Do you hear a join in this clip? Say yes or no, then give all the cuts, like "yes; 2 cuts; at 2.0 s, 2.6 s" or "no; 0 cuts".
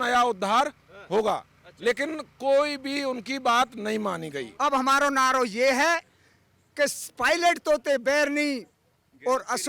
yes; 1 cut; at 4.4 s